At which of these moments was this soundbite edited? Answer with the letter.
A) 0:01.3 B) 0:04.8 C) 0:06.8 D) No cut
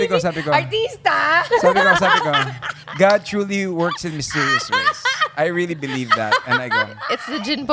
D